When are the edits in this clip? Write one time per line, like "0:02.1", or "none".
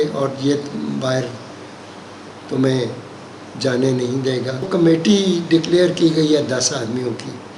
0:04.7